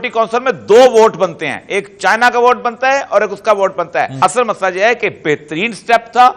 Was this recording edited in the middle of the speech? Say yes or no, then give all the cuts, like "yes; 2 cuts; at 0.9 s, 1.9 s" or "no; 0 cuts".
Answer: yes; 1 cut; at 4.1 s